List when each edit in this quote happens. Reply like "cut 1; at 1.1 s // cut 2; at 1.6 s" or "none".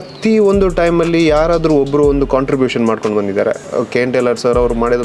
cut 1; at 3.6 s